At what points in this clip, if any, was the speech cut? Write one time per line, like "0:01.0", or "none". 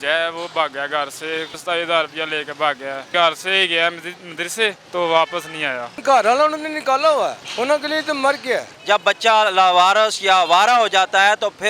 0:01.5
0:03.0
0:04.8
0:06.0
0:07.4
0:08.7